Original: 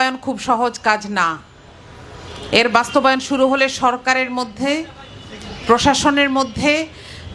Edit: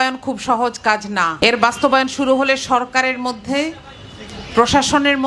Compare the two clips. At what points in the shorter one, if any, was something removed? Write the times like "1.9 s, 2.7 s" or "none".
1.3 s